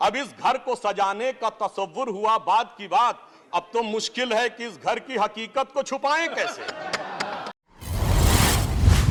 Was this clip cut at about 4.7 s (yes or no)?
no